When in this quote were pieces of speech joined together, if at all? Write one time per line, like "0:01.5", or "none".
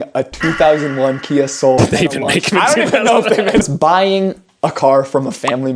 0:01.8
0:03.6